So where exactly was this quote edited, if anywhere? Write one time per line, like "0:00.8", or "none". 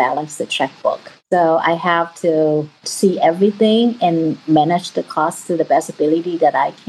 0:01.1
0:02.8